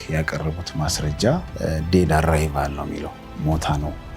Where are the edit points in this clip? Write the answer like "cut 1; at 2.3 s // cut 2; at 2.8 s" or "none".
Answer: cut 1; at 1.5 s